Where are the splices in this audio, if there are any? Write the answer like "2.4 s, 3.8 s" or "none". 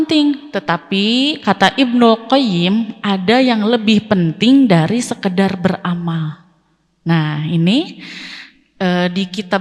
none